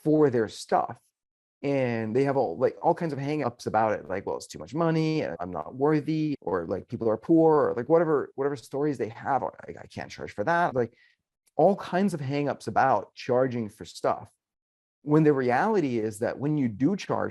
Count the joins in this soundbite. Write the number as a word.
four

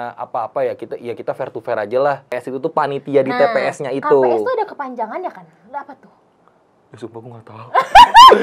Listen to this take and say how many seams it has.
one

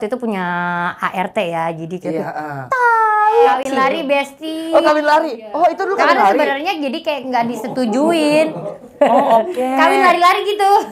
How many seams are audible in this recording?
one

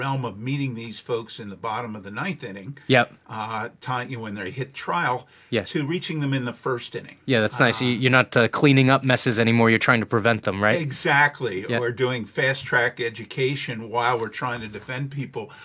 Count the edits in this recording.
zero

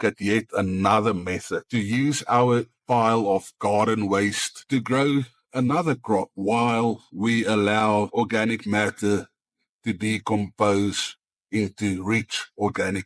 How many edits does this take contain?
three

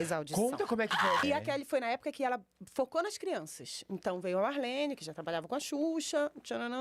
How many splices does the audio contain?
one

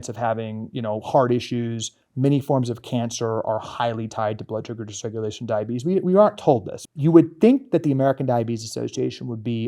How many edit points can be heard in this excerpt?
one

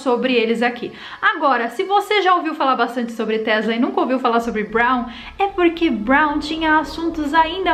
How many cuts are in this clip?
zero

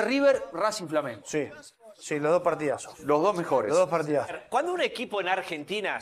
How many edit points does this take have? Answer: one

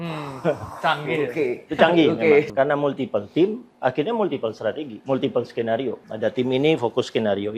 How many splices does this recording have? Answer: three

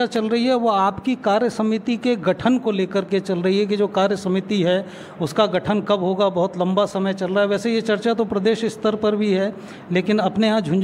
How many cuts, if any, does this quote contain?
zero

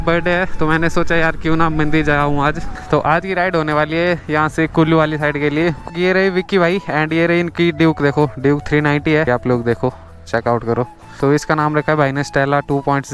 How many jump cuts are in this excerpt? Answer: four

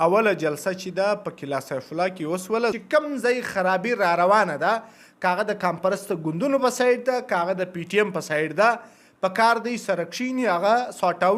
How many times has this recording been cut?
one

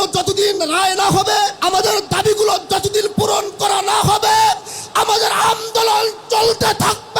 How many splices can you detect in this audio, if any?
one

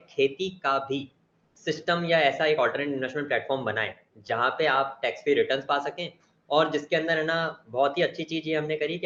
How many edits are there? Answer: zero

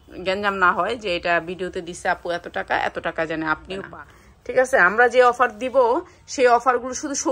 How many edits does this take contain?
one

